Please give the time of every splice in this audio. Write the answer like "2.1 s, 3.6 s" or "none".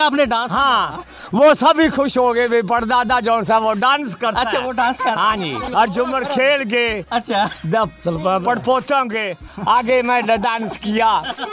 5.7 s